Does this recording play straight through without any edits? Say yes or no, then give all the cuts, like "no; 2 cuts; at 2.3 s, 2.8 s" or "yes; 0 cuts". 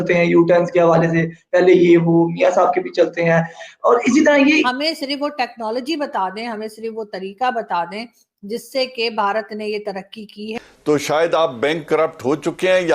no; 2 cuts; at 4.6 s, 10.5 s